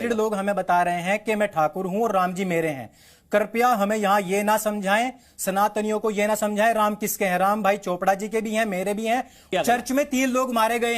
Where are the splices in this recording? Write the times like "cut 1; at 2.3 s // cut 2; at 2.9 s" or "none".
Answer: cut 1; at 9.5 s

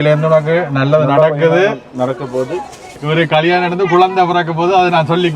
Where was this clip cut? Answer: cut 1; at 2.9 s

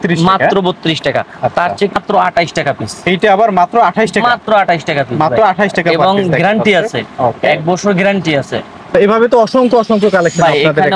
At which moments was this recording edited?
none

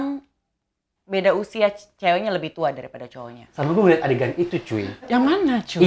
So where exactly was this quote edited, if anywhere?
cut 1; at 3.3 s

